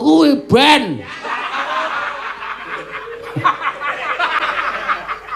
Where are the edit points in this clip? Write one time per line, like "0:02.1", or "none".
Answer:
0:04.4

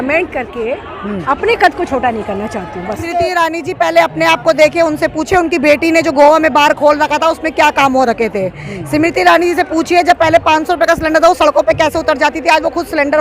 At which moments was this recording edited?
0:02.7

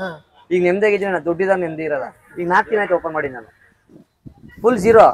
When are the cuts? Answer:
0:02.3

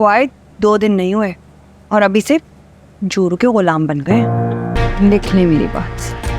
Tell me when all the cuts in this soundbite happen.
0:04.7

